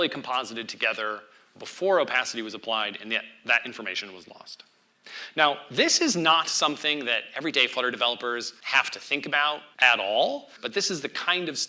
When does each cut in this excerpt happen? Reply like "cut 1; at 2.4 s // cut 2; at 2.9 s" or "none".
cut 1; at 8.6 s // cut 2; at 9.7 s // cut 3; at 10.6 s